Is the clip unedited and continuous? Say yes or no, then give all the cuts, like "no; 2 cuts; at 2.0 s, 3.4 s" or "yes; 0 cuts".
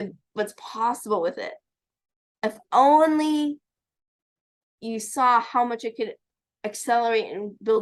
yes; 0 cuts